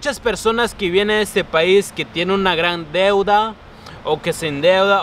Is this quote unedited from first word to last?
yes; 0 cuts

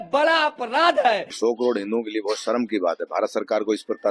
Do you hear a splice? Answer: yes; 1 cut; at 1.4 s

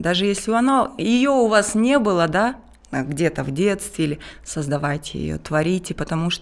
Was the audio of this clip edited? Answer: no; 0 cuts

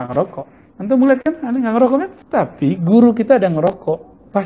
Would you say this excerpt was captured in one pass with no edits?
no; 1 cut; at 2.2 s

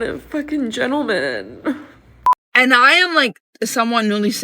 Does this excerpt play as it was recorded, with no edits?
no; 1 cut; at 2.2 s

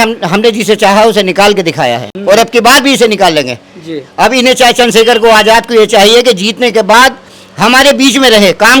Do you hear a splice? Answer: no; 0 cuts

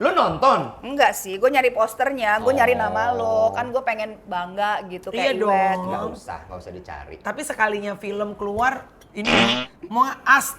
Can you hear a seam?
no; 0 cuts

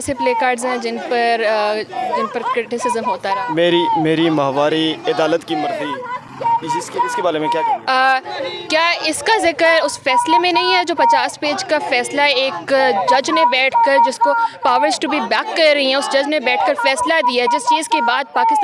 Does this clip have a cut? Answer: no; 0 cuts

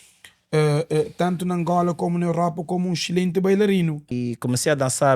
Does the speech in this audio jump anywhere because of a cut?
yes; 1 cut; at 4.1 s

